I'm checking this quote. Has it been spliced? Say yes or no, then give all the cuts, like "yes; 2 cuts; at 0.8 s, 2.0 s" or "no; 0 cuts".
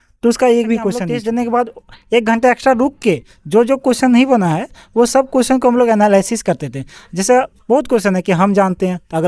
yes; 1 cut; at 1.1 s